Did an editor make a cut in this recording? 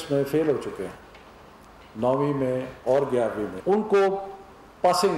yes; 1 cut; at 3.5 s

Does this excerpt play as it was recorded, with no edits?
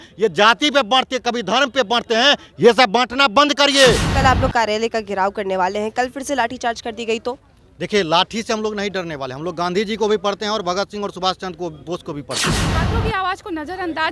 no; 2 cuts; at 4.1 s, 12.7 s

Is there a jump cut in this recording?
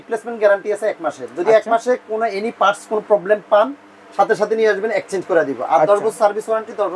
no; 0 cuts

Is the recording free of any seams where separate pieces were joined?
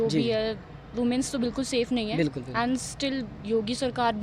yes; 0 cuts

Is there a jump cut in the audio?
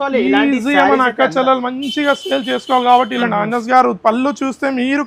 yes; 1 cut; at 3.2 s

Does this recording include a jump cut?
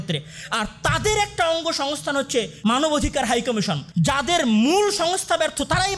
yes; 2 cuts; at 2.5 s, 3.8 s

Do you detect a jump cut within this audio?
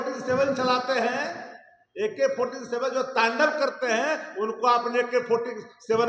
no; 0 cuts

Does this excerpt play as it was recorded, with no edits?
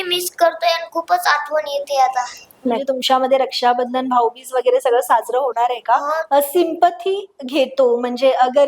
no; 2 cuts; at 2.8 s, 6.2 s

